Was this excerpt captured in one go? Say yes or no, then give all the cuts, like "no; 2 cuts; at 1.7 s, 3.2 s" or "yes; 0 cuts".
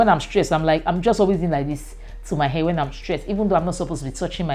yes; 0 cuts